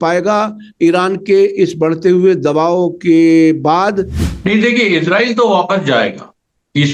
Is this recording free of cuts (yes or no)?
no